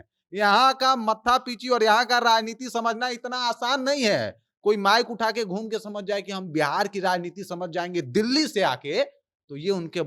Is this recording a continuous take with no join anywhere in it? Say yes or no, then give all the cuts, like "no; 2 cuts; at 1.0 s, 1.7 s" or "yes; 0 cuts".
yes; 0 cuts